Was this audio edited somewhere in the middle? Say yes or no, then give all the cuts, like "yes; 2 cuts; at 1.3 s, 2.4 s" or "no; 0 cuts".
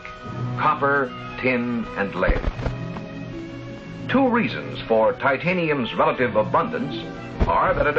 yes; 1 cut; at 1.0 s